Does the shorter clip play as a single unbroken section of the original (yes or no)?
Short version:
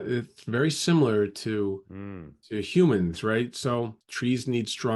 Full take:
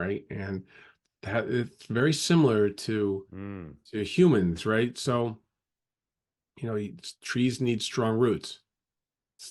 no